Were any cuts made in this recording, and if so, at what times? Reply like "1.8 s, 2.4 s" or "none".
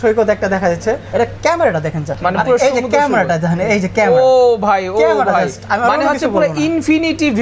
1.0 s, 2.1 s